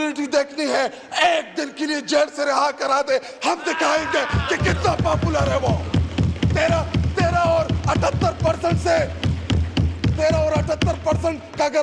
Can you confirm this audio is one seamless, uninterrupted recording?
yes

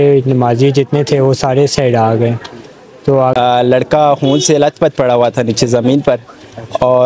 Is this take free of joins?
no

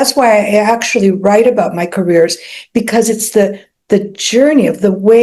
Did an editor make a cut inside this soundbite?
no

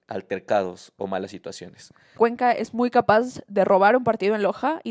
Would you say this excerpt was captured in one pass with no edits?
no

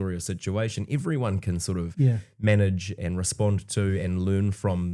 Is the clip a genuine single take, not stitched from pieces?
yes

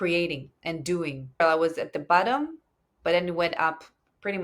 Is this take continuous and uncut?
no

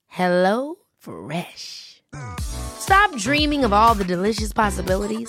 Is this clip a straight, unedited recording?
yes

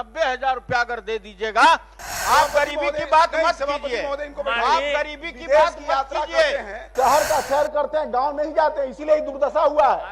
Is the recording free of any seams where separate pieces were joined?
no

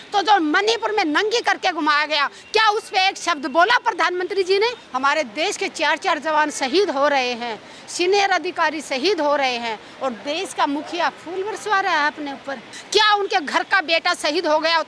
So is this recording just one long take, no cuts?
no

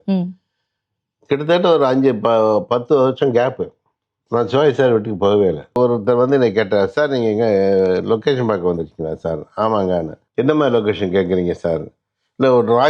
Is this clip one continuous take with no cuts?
no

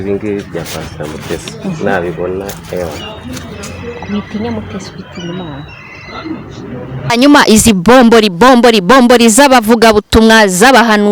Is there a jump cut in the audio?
yes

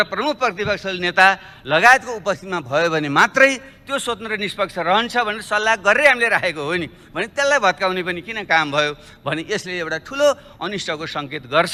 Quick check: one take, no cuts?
yes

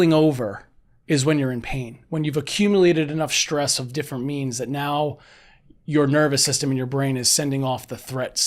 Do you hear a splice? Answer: no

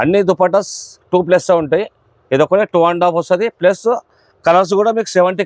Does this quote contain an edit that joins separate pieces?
no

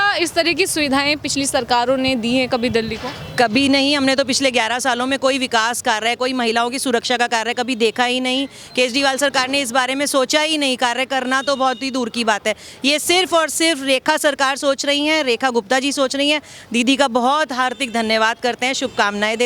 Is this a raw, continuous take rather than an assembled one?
yes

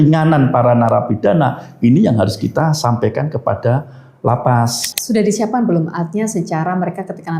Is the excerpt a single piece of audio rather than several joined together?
no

